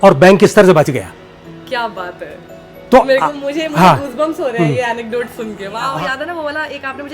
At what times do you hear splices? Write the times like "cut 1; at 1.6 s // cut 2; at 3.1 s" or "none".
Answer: cut 1; at 5.8 s